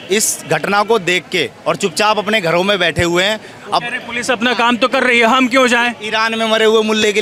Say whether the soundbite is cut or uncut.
uncut